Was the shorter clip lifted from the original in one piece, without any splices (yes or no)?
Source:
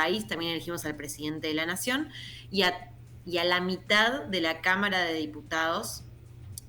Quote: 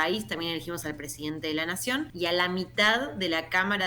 no